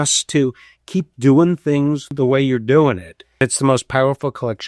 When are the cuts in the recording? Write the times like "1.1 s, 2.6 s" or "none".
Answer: 2.1 s, 3.4 s

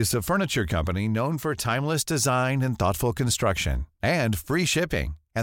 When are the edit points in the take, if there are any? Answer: none

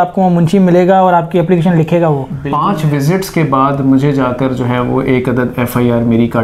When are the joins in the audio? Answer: 2.3 s

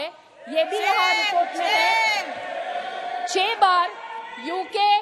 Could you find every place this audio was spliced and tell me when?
none

